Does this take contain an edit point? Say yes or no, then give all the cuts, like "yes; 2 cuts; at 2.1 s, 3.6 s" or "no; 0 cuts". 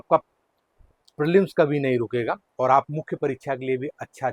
no; 0 cuts